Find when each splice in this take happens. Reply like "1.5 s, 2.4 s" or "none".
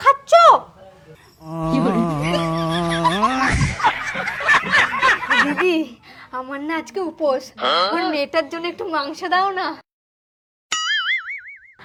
none